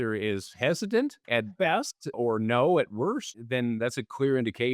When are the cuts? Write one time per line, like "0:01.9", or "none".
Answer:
0:01.2
0:03.8